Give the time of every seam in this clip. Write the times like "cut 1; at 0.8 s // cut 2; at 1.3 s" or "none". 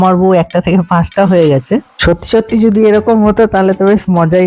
none